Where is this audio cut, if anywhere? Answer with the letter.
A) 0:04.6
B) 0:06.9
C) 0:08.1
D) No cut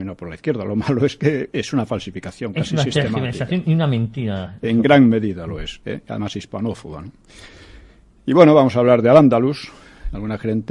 C